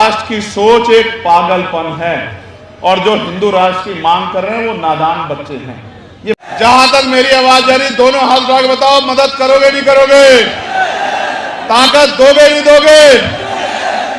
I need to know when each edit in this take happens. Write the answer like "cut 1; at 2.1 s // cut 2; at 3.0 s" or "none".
cut 1; at 6.4 s